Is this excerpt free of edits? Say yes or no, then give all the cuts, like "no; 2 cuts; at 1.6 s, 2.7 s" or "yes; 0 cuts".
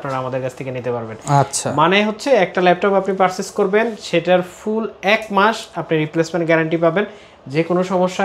yes; 0 cuts